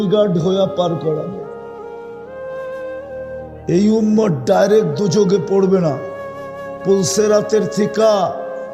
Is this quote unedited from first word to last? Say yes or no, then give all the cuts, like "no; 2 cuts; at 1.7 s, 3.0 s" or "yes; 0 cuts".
no; 2 cuts; at 1.4 s, 3.6 s